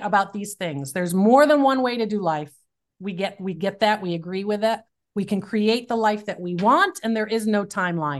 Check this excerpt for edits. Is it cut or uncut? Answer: uncut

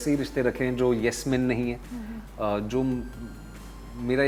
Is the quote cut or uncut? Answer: uncut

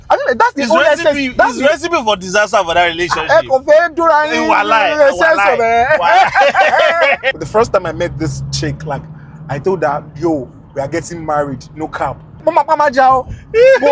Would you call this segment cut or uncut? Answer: cut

